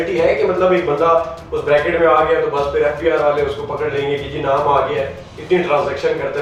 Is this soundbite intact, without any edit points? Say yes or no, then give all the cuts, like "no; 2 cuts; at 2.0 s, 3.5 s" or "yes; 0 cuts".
yes; 0 cuts